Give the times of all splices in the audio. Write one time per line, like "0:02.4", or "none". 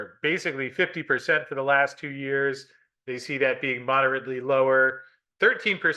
none